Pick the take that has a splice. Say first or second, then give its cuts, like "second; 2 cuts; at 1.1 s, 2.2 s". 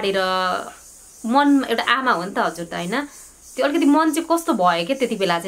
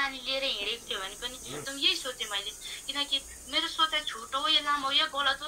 second; 1 cut; at 1.6 s